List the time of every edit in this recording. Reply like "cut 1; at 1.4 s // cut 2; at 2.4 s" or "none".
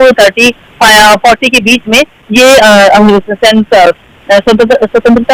none